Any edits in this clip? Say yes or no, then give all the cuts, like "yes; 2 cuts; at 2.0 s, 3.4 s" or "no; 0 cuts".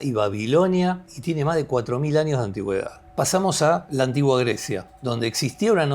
yes; 4 cuts; at 1.1 s, 3.0 s, 3.9 s, 4.9 s